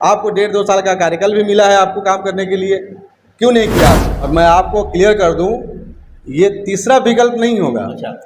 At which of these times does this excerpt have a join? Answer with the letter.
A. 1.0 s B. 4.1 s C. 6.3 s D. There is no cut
B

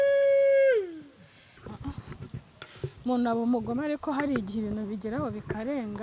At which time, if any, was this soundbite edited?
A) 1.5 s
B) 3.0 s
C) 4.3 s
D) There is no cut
A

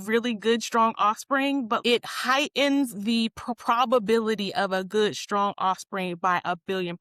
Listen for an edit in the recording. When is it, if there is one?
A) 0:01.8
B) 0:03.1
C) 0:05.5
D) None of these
A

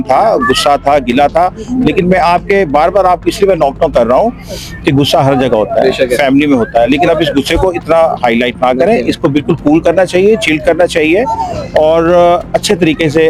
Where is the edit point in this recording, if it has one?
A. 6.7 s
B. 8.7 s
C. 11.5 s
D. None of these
D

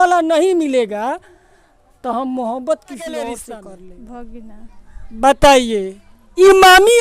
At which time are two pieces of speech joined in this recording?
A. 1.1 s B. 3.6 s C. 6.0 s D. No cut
B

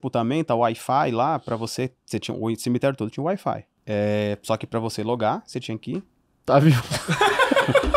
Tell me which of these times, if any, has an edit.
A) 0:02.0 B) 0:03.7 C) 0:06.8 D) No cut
B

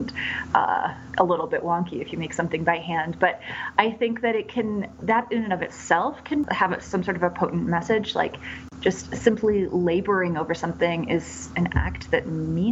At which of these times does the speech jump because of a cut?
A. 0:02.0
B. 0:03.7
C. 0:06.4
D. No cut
C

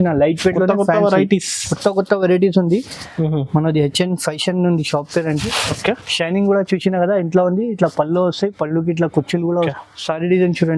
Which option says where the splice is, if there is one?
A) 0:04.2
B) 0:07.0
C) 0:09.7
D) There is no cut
C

